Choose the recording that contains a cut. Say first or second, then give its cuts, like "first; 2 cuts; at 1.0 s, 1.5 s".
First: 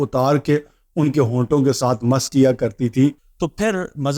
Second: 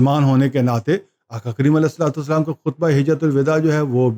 first; 1 cut; at 3.3 s